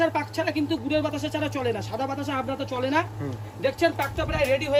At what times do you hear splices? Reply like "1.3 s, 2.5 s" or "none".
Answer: none